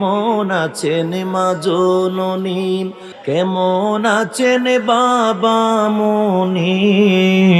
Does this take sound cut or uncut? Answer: cut